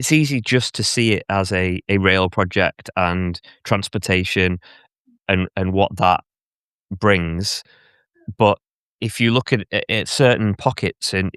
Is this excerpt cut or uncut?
uncut